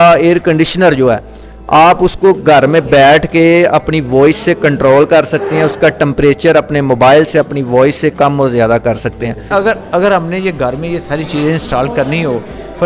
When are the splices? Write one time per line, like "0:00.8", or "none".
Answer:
0:09.4